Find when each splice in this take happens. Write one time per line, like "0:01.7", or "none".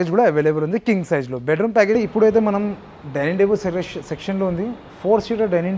0:02.0

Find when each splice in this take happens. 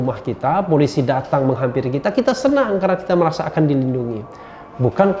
none

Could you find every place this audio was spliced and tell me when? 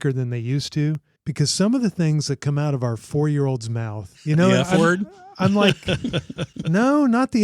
0:01.2
0:04.1

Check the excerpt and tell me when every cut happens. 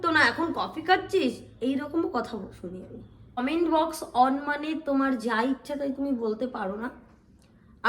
0:03.4

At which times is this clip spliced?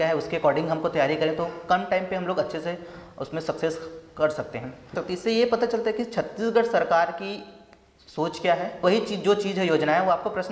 0:04.9
0:08.8

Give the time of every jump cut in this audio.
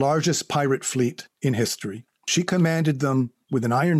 0:02.3

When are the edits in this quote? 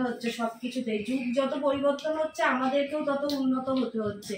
none

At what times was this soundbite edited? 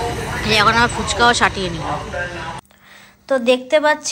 0:02.6

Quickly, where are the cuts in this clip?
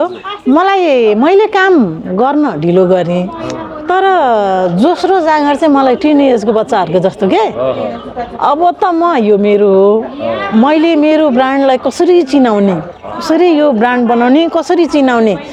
none

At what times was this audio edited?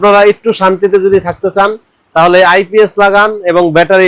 none

